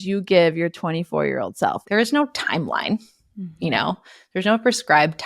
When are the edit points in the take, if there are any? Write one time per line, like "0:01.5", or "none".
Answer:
0:01.8